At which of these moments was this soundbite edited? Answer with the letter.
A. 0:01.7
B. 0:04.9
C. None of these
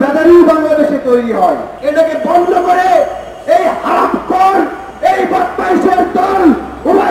A